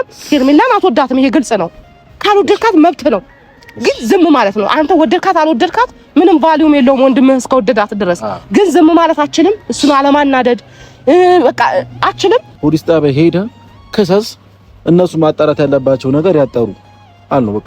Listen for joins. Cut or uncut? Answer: cut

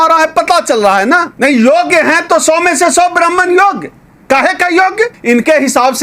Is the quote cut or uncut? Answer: cut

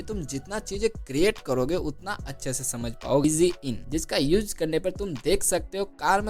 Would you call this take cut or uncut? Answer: cut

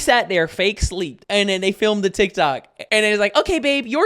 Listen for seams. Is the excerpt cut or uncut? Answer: cut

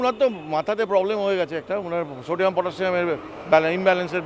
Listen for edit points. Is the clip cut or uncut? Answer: uncut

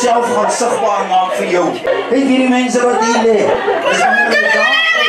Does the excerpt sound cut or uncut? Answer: cut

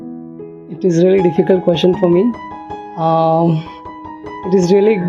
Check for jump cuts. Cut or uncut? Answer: uncut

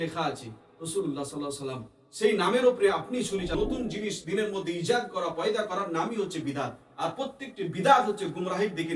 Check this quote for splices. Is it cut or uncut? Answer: cut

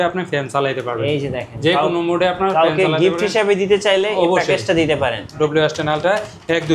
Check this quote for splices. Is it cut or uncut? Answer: cut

